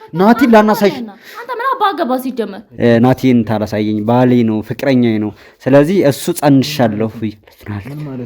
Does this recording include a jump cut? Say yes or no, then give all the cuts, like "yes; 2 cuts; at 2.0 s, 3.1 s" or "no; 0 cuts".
yes; 1 cut; at 2.6 s